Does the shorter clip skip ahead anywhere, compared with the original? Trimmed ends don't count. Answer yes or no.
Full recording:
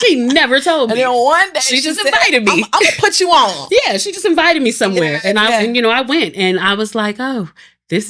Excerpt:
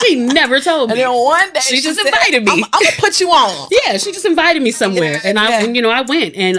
no